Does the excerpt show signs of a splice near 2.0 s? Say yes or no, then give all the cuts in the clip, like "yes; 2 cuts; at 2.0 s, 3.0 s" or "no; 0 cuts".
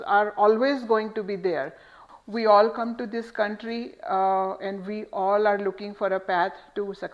yes; 1 cut; at 2.0 s